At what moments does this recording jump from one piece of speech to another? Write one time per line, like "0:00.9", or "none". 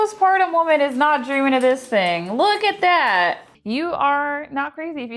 0:03.5